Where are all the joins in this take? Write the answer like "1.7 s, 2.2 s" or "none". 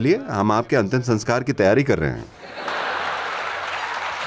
2.6 s